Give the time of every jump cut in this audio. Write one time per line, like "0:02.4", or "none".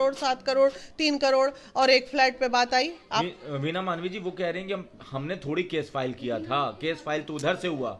none

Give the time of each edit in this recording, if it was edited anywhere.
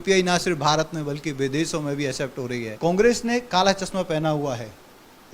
0:02.7

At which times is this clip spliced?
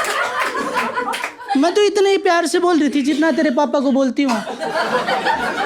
none

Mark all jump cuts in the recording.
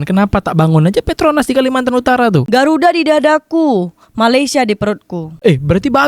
0:02.4

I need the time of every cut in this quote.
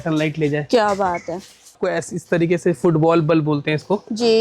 0:01.8

